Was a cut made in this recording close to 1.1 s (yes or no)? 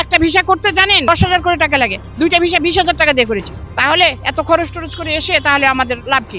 yes